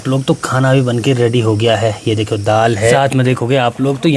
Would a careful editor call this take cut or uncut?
cut